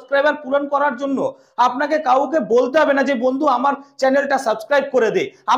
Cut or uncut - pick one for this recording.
uncut